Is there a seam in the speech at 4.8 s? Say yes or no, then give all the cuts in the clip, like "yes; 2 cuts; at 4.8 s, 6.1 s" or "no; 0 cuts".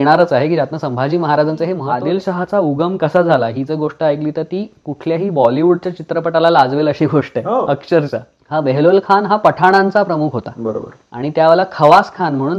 no; 2 cuts; at 1.8 s, 8.3 s